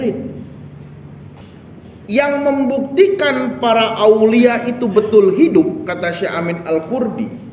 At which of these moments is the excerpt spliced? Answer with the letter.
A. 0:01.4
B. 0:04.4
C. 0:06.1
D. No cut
A